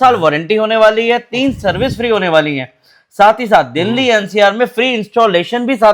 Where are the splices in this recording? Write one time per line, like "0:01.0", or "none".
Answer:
none